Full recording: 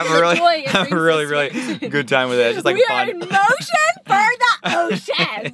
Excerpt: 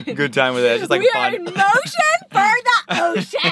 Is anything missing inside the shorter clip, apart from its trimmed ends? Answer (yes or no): no